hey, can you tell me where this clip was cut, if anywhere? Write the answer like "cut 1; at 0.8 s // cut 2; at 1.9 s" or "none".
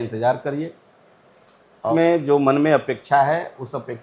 cut 1; at 1.9 s